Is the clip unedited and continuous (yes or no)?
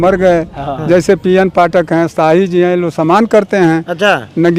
yes